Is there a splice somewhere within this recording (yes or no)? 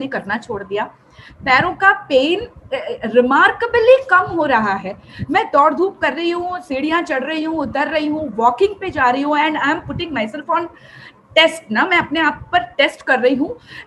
no